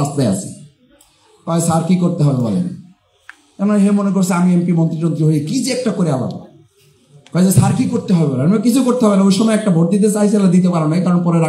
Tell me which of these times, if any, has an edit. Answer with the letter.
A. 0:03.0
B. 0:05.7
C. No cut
C